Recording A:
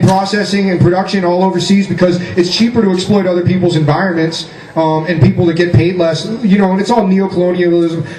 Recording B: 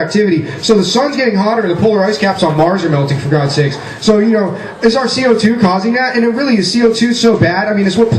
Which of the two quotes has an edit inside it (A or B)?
B